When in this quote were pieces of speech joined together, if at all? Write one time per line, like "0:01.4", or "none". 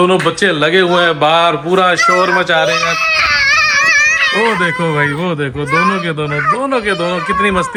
none